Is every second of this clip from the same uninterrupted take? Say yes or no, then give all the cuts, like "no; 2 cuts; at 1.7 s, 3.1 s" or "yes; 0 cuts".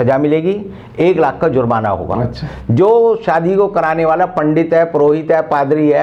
yes; 0 cuts